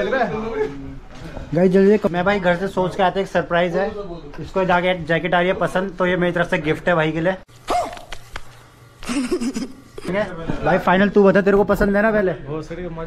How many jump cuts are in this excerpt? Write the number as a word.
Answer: three